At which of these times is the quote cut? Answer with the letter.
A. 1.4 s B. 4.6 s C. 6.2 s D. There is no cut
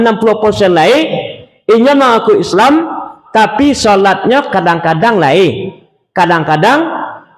D